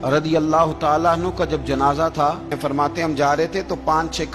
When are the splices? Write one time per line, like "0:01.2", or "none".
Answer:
0:02.6